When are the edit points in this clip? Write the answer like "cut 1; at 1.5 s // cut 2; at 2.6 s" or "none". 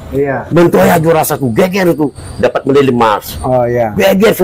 none